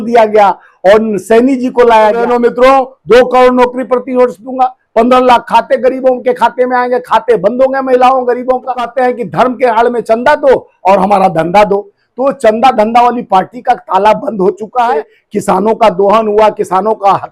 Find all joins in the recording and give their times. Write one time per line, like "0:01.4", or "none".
0:02.2
0:08.9
0:15.1